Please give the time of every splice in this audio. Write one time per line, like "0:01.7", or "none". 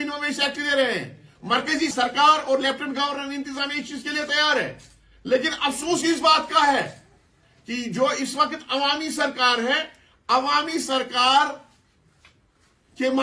0:01.9